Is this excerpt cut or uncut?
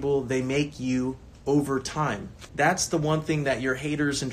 cut